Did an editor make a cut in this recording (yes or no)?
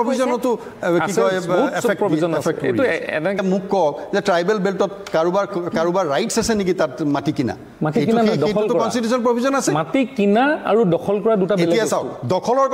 yes